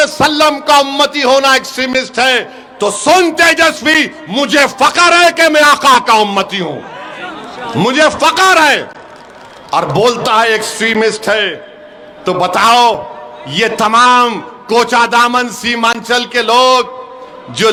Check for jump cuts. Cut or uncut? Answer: uncut